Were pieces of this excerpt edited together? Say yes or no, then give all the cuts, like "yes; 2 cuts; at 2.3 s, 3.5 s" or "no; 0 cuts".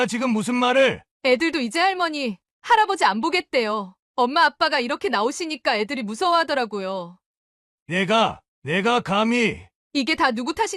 yes; 1 cut; at 1.1 s